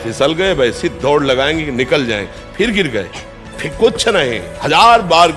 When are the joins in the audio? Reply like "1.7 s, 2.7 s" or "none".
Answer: 4.5 s